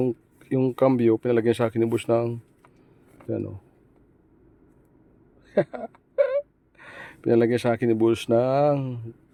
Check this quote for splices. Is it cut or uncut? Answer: uncut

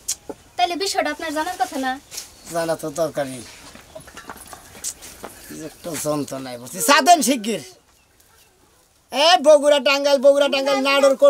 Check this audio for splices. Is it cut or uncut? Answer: uncut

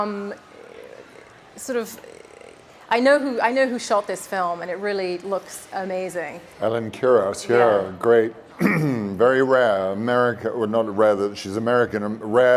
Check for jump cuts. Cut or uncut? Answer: cut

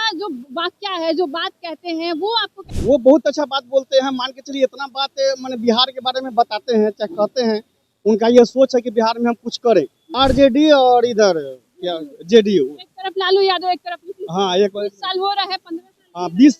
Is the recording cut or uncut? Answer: cut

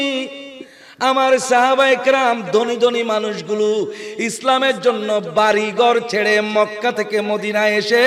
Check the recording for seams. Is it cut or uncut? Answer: uncut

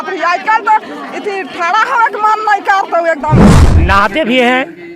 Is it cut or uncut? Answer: cut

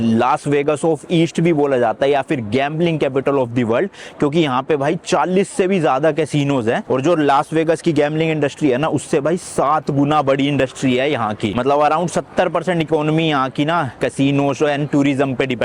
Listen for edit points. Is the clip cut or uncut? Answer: uncut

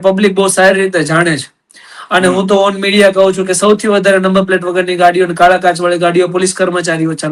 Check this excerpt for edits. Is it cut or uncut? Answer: uncut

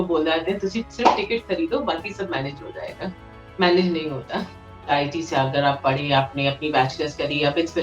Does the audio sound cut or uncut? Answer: cut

